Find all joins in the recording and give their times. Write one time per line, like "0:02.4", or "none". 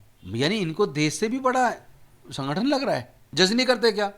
0:03.2